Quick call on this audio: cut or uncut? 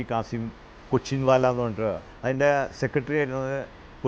cut